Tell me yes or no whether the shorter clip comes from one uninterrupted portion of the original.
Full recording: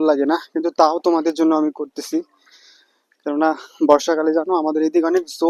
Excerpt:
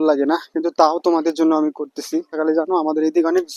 no